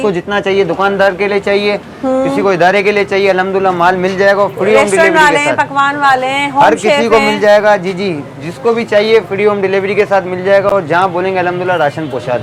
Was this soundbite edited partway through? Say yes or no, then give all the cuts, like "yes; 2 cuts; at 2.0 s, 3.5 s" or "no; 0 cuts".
no; 0 cuts